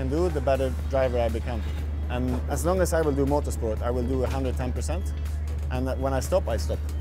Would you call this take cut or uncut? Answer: uncut